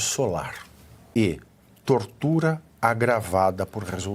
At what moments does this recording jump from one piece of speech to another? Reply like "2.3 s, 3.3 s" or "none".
1.1 s